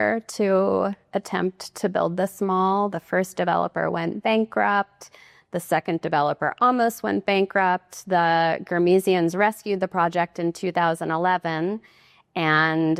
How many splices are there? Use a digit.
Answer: 0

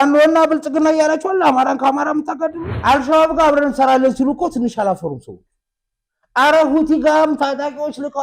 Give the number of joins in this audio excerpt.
1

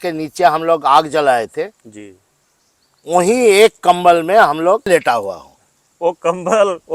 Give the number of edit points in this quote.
1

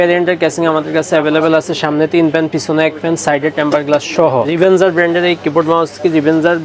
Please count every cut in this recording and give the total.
1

